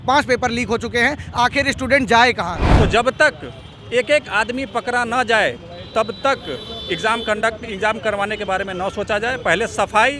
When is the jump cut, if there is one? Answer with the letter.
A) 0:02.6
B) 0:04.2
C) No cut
A